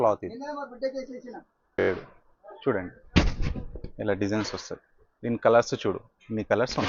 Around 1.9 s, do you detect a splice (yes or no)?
yes